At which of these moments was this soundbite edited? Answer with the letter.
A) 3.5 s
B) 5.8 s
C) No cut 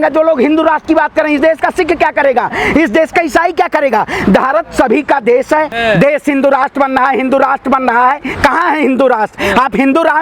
B